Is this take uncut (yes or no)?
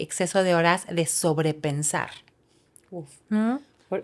yes